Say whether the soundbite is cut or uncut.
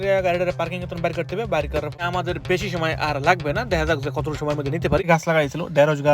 cut